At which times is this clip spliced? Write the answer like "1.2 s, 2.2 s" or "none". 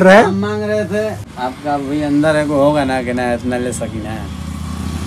1.3 s